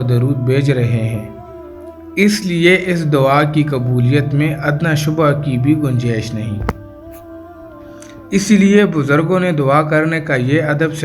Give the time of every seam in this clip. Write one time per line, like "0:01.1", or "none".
0:06.8
0:08.3

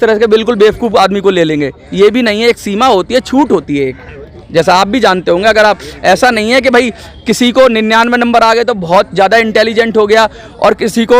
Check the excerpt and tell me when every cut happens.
none

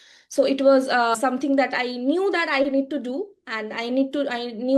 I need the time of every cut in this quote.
none

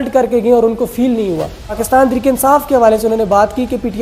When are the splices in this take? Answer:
0:01.8

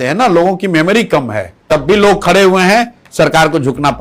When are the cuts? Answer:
0:01.7

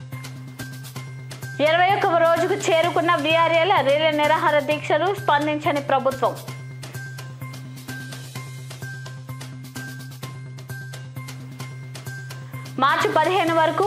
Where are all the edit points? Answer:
0:01.4
0:06.4

